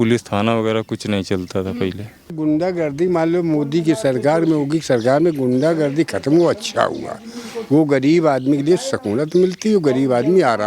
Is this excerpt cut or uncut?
cut